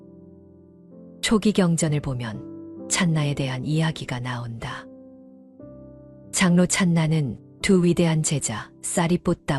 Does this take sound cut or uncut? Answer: cut